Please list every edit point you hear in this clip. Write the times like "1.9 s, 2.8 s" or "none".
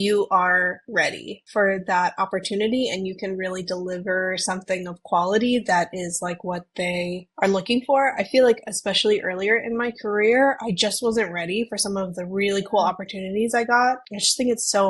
1.0 s